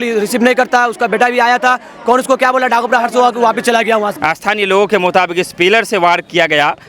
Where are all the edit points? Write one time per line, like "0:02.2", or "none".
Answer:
0:04.4